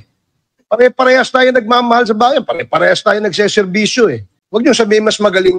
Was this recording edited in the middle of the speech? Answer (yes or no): yes